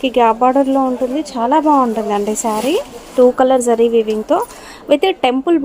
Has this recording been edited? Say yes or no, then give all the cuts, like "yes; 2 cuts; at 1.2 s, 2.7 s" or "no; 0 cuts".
yes; 1 cut; at 3.1 s